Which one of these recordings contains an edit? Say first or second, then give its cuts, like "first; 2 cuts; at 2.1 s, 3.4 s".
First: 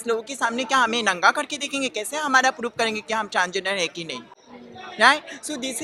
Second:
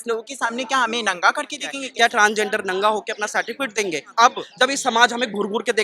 second; 2 cuts; at 1.8 s, 4.4 s